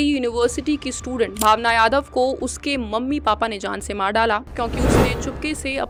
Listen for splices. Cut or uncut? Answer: uncut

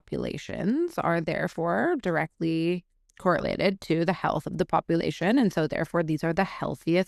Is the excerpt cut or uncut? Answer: uncut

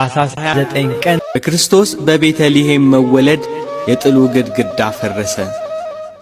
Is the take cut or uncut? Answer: cut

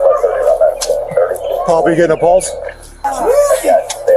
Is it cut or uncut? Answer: cut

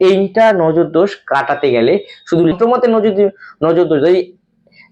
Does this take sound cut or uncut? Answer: cut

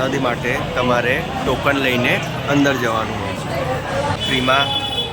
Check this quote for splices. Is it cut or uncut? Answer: cut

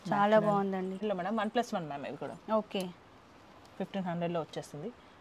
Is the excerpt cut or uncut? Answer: cut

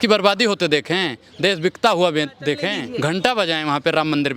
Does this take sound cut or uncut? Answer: cut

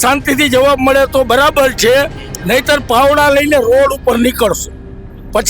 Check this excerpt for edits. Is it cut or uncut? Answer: uncut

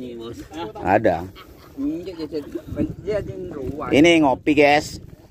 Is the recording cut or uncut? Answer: uncut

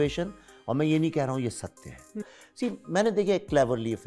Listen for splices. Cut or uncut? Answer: cut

